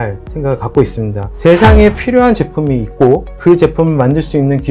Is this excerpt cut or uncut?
cut